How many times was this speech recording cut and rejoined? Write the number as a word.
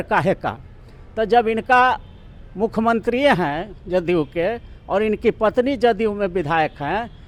zero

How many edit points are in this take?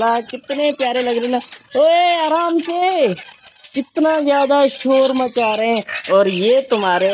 zero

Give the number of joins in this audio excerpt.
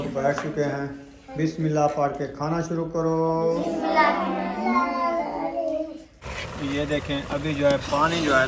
one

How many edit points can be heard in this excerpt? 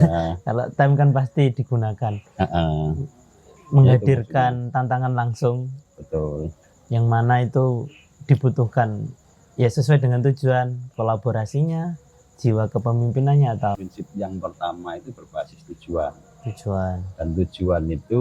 one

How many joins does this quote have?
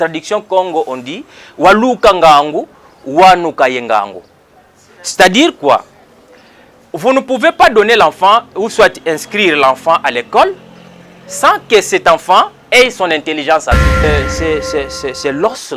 one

